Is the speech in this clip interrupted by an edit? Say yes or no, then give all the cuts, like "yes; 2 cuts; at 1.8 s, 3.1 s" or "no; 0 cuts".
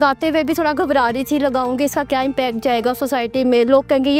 no; 0 cuts